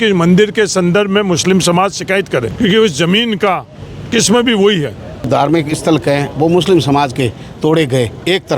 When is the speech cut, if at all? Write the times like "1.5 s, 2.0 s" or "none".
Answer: 2.5 s, 5.3 s